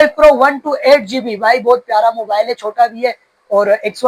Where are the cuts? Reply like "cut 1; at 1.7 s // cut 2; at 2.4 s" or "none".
none